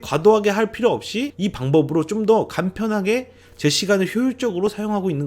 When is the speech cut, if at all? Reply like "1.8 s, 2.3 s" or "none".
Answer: 1.2 s